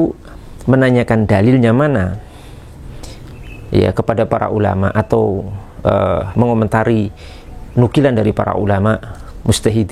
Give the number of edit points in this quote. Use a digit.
0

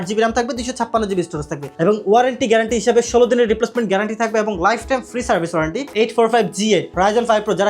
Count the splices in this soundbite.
2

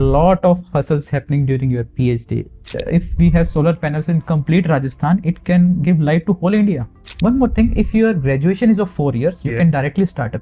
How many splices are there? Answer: 2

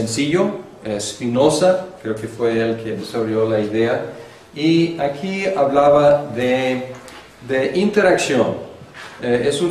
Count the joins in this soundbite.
1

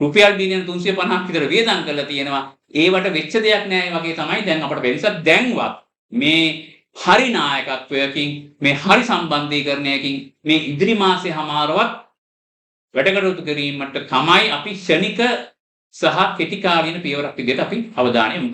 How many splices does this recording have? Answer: 0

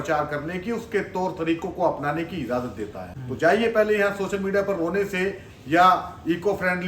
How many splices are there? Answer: 1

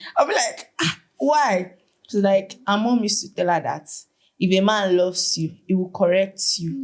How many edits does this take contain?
0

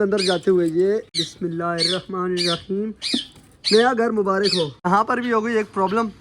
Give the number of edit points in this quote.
2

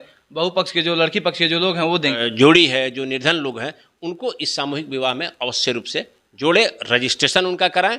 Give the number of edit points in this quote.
1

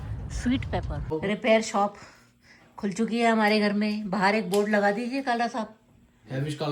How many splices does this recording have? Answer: 1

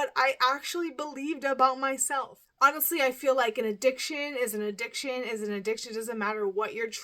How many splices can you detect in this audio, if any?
1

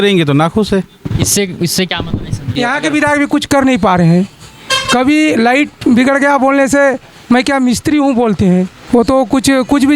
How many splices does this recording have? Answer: 2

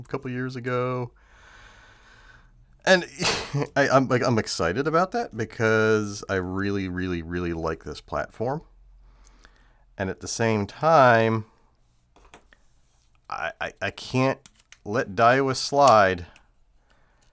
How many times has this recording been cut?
0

